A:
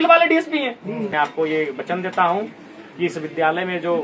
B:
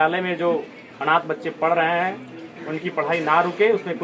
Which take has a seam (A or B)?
A